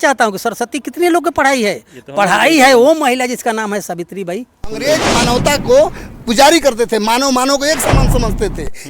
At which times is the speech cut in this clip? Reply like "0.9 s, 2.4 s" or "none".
4.8 s